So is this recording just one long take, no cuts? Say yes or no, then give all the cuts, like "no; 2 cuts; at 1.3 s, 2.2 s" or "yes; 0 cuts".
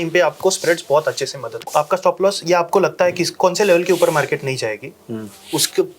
no; 1 cut; at 1.6 s